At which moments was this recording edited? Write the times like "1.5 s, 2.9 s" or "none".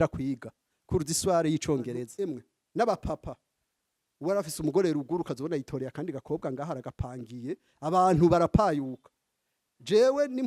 2.1 s